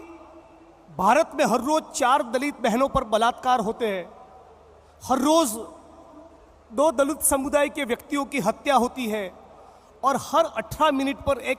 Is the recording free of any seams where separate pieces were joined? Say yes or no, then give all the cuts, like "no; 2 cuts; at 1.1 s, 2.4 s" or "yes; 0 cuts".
yes; 0 cuts